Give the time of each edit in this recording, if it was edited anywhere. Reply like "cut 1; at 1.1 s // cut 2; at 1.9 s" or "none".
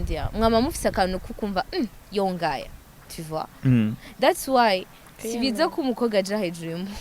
none